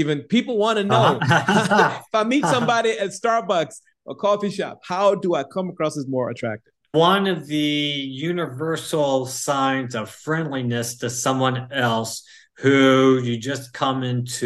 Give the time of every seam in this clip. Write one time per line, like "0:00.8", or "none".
0:06.7